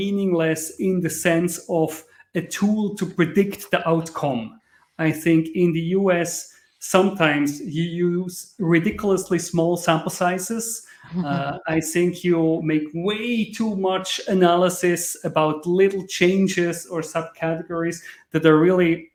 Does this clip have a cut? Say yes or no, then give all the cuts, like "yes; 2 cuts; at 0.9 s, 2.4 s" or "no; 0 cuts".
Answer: no; 0 cuts